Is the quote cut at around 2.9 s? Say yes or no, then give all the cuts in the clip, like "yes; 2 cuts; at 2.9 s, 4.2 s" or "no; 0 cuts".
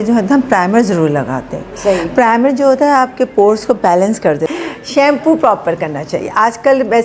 no; 1 cut; at 4.5 s